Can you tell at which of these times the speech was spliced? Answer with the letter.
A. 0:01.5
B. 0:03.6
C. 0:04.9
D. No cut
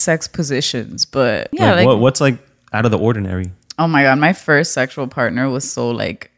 A